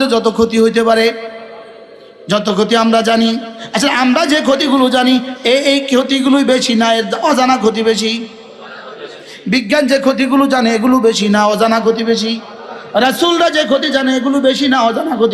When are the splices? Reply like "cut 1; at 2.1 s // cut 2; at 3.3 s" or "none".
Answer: none

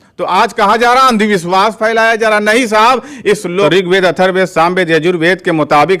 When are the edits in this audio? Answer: cut 1; at 3.6 s

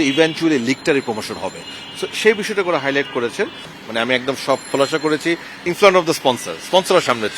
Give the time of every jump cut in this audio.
cut 1; at 3.7 s

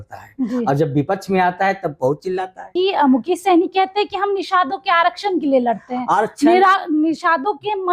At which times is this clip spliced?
cut 1; at 2.6 s

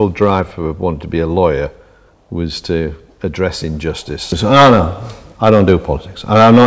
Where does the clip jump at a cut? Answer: cut 1; at 4.3 s

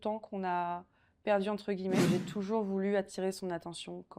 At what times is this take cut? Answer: cut 1; at 2.0 s

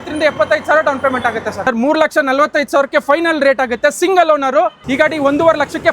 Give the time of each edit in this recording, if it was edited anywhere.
cut 1; at 1.6 s // cut 2; at 4.8 s

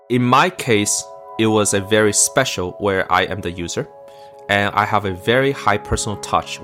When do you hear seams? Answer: none

